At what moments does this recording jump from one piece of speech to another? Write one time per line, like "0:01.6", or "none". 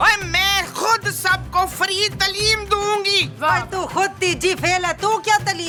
none